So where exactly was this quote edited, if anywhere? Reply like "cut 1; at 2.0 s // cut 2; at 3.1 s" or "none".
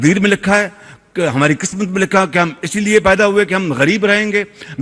none